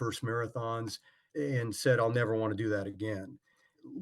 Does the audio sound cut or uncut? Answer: cut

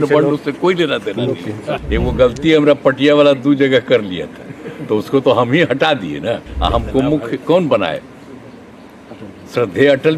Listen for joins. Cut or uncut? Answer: cut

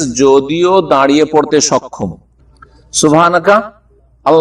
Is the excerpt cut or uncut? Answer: cut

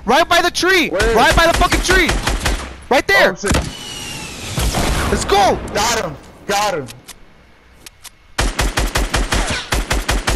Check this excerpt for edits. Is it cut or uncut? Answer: cut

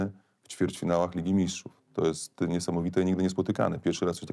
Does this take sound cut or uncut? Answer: uncut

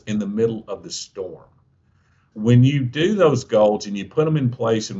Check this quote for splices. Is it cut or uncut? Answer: cut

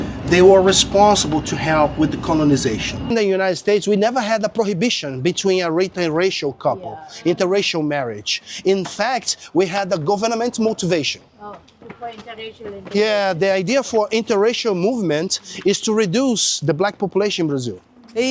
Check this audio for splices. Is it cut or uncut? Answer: cut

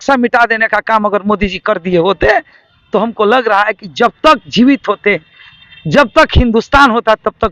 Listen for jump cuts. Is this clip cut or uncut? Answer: uncut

